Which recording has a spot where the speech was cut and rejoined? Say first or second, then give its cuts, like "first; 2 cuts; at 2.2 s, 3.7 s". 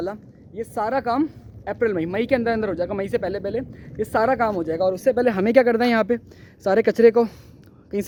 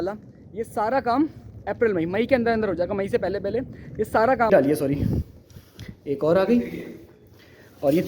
second; 1 cut; at 4.5 s